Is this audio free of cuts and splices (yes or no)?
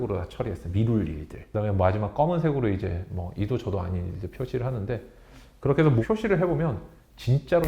no